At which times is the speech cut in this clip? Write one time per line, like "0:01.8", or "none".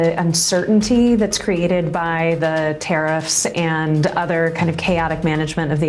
none